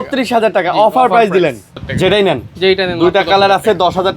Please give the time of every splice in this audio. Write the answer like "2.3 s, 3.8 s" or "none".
1.8 s

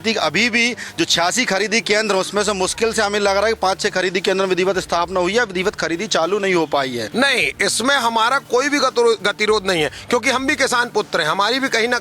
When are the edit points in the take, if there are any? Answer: 7.0 s

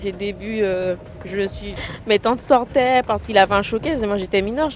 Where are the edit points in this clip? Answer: 1.6 s

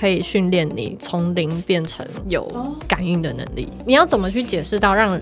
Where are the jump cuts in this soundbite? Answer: 1.0 s, 2.4 s, 3.8 s

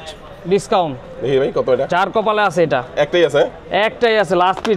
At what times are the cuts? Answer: none

